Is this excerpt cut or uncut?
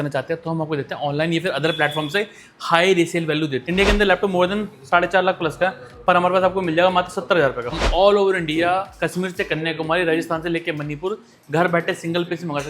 cut